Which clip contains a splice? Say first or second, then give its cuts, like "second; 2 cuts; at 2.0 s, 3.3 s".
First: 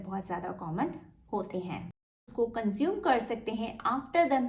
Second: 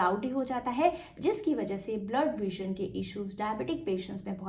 first; 1 cut; at 2.0 s